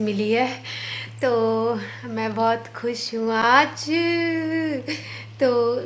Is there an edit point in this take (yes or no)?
no